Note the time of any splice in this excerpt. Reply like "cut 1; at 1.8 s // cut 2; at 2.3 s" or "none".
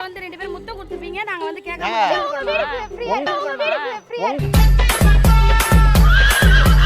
cut 1; at 3.3 s